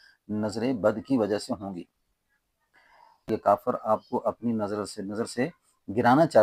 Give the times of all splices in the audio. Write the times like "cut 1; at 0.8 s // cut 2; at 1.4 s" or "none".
cut 1; at 3.2 s